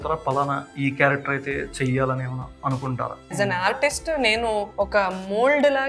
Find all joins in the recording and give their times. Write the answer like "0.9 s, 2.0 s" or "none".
3.3 s, 4.7 s